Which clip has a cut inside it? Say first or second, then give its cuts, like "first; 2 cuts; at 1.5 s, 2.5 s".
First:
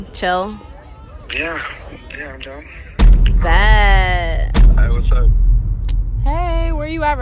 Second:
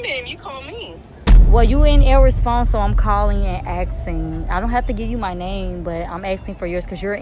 first; 1 cut; at 4.4 s